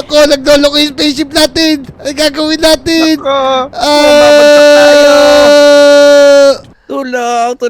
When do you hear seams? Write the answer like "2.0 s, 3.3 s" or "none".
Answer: 6.7 s